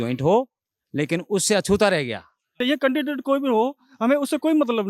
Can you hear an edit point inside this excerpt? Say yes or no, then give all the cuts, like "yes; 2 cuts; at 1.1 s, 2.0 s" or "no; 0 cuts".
yes; 1 cut; at 2.6 s